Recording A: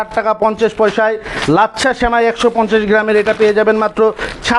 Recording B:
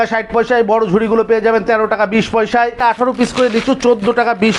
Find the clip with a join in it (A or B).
B